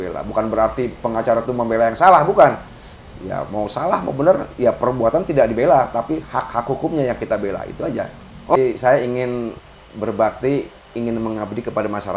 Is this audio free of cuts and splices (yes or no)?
no